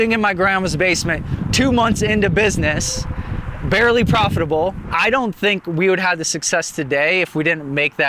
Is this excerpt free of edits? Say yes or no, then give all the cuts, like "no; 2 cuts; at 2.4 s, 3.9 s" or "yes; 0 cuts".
no; 1 cut; at 4.8 s